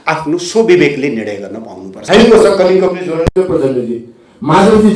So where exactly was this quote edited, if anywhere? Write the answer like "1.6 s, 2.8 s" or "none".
2.0 s